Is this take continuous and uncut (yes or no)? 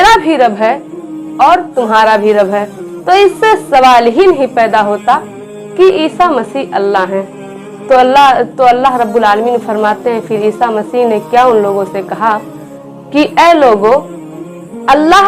yes